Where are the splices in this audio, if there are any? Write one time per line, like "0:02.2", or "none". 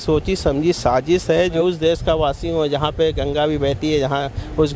0:01.6